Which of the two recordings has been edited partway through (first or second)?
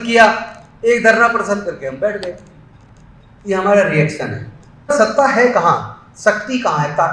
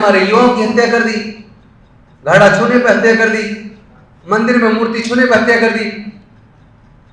first